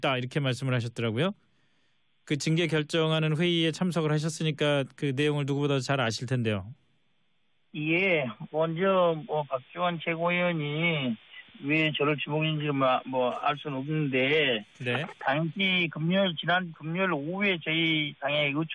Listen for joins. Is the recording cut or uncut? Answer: uncut